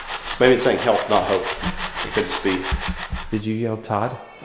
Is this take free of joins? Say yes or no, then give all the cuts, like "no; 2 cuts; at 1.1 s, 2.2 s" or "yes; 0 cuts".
no; 1 cut; at 3.1 s